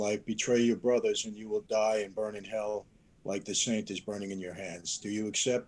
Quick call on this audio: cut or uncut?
uncut